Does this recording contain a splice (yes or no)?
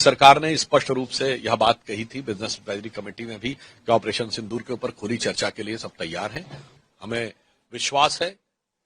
yes